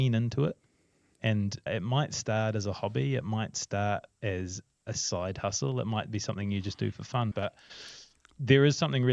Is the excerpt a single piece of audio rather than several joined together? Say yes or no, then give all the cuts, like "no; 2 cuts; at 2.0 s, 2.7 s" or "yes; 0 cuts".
no; 1 cut; at 7.3 s